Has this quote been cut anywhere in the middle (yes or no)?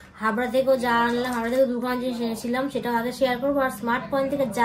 no